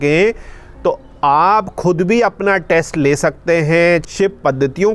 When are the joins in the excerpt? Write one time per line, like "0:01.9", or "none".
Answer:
0:04.0